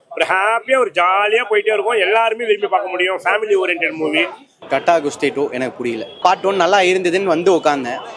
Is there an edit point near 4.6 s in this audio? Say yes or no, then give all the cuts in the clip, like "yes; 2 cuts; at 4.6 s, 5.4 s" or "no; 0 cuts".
yes; 2 cuts; at 4.6 s, 6.1 s